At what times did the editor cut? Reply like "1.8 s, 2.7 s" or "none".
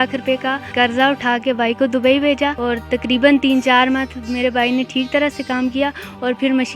none